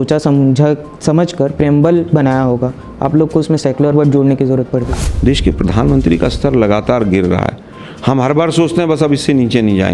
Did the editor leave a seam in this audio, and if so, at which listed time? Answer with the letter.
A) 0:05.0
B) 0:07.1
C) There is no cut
A